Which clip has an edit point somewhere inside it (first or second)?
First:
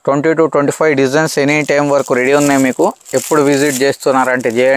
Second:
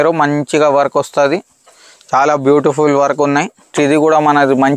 second